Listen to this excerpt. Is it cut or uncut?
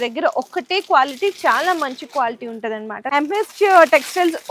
cut